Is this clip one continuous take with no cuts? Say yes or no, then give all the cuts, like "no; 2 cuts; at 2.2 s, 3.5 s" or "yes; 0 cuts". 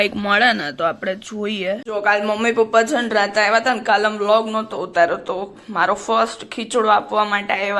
no; 1 cut; at 1.8 s